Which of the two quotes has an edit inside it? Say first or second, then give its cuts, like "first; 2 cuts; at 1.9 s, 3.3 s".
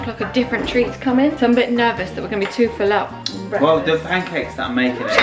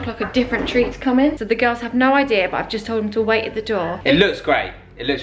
second; 2 cuts; at 1.3 s, 4.0 s